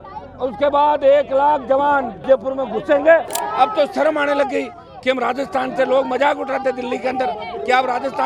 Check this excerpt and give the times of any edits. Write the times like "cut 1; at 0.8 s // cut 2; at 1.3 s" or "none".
cut 1; at 2.2 s // cut 2; at 3.4 s